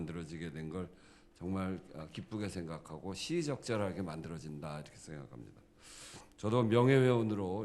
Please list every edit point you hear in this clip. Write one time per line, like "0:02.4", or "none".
none

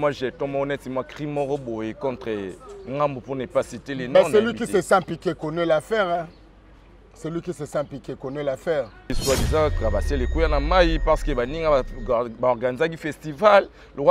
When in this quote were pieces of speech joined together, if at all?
0:09.2

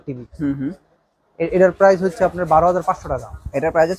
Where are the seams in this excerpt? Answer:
none

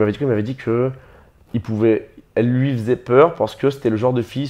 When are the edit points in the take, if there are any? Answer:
none

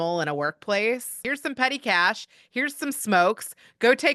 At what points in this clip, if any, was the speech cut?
0:01.2

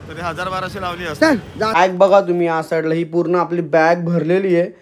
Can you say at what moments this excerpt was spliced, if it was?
0:01.8

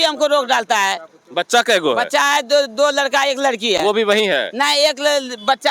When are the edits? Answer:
none

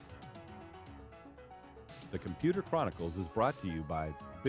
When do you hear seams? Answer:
0:02.1

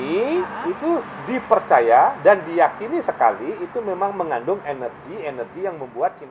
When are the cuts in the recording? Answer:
none

